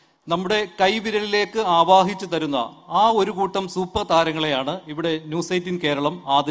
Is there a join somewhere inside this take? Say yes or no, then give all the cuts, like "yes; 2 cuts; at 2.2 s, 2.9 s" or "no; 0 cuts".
no; 0 cuts